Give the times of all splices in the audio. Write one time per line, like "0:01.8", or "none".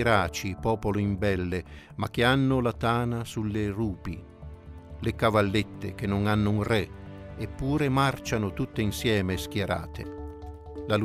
none